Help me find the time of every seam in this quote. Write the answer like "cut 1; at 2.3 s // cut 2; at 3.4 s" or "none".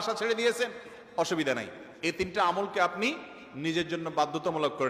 none